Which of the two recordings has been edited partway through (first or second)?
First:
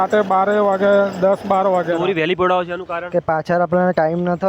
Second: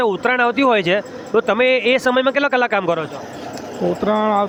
first